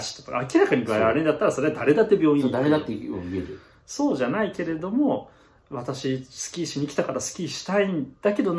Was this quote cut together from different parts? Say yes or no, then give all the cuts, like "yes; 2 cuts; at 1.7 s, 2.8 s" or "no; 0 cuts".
no; 0 cuts